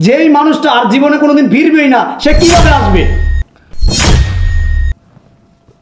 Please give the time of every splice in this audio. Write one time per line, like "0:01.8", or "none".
none

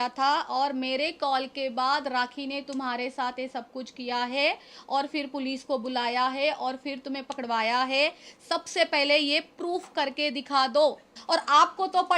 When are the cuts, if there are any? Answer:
0:11.1

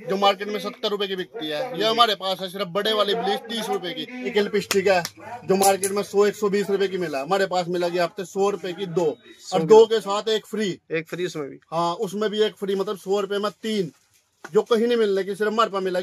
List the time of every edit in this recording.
0:04.3

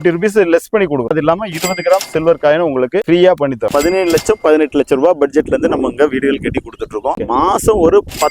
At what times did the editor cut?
0:01.1
0:03.7

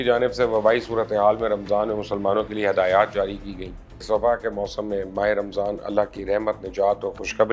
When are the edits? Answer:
0:04.0

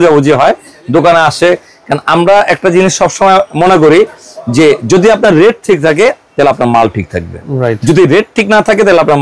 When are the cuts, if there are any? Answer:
none

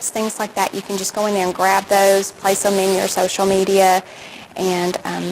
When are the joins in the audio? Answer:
0:01.9

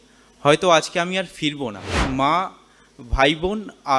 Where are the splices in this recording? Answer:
0:02.0

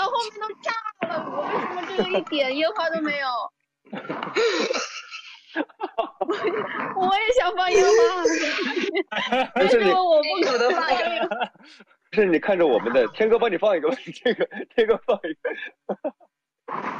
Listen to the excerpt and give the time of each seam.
none

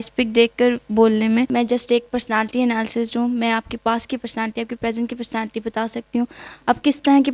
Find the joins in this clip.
0:01.5

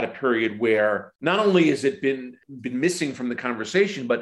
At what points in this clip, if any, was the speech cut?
0:01.1
0:02.4

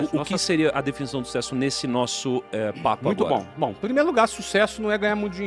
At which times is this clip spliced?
none

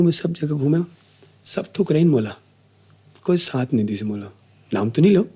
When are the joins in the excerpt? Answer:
none

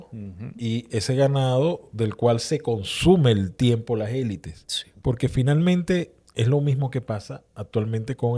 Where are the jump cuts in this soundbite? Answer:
none

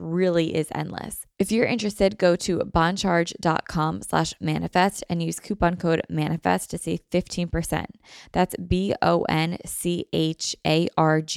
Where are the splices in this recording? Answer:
0:01.2

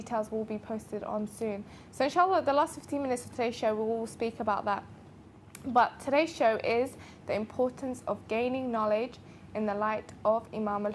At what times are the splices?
none

